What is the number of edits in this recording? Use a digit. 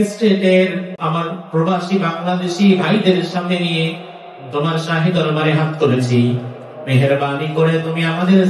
1